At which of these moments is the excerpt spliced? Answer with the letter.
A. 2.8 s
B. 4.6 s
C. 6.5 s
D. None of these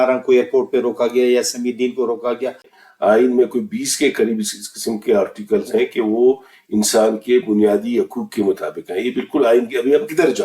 A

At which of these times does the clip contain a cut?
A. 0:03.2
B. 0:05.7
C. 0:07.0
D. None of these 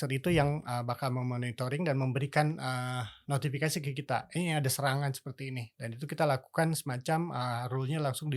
D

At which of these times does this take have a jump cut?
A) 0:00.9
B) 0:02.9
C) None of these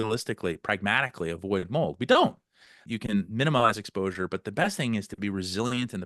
B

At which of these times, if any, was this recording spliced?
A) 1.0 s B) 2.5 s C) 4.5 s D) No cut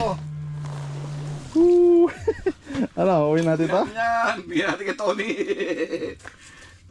D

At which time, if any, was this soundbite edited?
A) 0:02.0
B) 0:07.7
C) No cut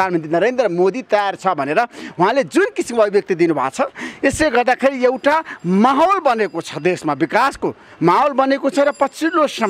C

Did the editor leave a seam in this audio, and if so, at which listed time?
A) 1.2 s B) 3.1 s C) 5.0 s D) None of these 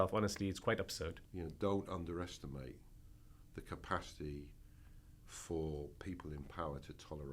A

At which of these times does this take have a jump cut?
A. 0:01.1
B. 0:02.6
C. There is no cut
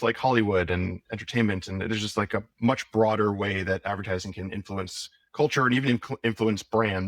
A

